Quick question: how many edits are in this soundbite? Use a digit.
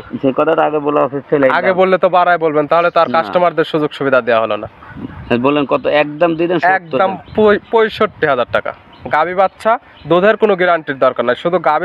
0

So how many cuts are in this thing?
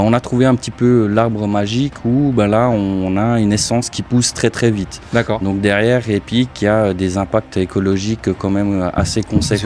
0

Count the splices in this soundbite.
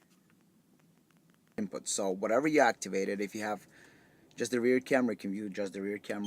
1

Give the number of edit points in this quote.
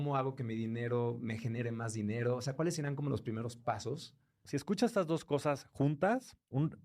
1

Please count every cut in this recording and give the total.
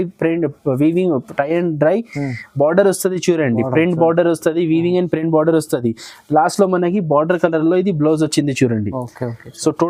0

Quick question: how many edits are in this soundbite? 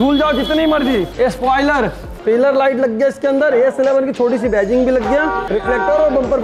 3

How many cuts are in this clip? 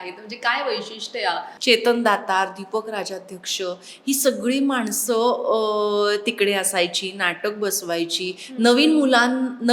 1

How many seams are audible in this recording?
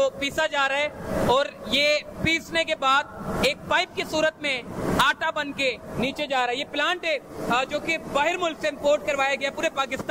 0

